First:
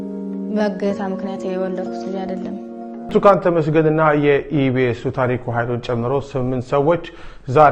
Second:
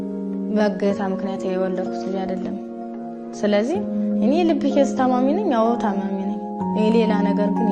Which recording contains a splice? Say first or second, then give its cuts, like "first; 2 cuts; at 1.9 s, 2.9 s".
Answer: first; 1 cut; at 3.0 s